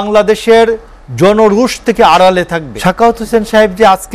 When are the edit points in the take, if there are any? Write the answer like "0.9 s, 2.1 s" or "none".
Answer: 2.7 s